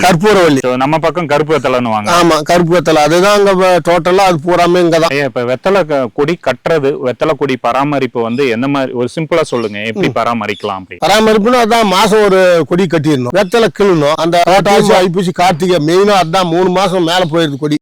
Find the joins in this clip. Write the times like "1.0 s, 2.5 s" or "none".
none